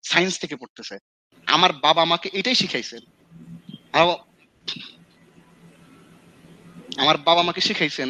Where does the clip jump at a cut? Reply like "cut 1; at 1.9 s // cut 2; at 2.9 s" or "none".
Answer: cut 1; at 1.3 s